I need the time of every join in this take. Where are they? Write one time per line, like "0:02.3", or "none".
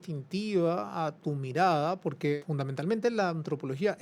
0:02.4